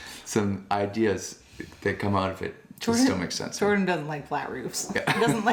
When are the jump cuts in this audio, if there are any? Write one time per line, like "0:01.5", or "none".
none